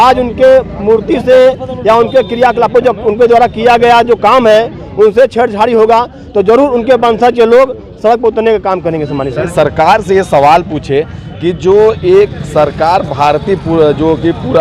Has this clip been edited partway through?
yes; 1 cut; at 9.4 s

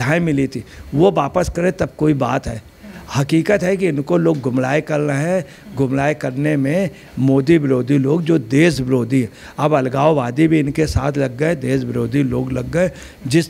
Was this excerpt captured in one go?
yes; 0 cuts

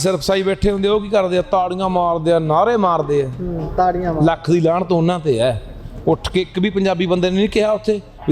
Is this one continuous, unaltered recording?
yes; 0 cuts

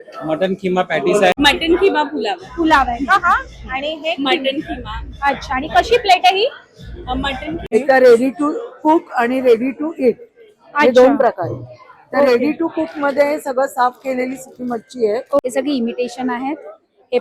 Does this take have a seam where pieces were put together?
yes; 3 cuts; at 1.3 s, 7.6 s, 15.4 s

